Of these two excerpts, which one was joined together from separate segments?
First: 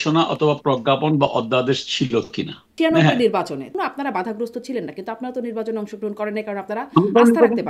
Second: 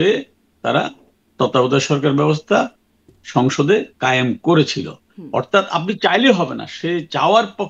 first; 2 cuts; at 2.7 s, 3.7 s

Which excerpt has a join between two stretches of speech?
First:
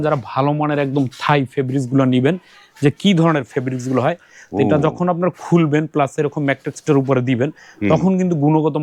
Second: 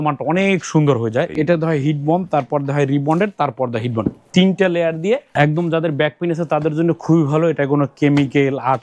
second; 2 cuts; at 1.3 s, 5.3 s

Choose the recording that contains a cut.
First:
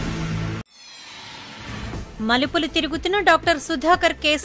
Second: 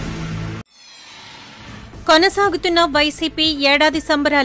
second; 1 cut; at 1.7 s

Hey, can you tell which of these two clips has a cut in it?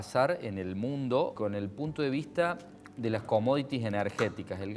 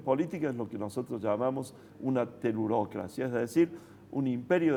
first; 1 cut; at 1.4 s

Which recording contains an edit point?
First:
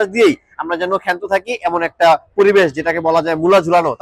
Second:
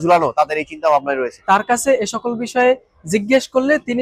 second; 1 cut; at 1.4 s

